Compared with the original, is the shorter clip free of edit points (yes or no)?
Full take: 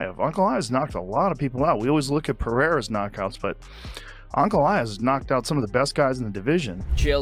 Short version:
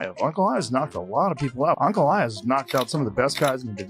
no